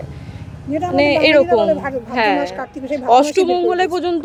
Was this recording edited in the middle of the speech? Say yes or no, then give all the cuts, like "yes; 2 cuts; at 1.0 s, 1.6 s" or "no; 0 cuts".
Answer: no; 0 cuts